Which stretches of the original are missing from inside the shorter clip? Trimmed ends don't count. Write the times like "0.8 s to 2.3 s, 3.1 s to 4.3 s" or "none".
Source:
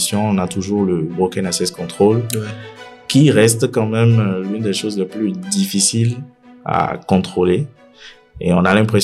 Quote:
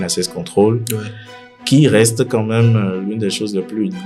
none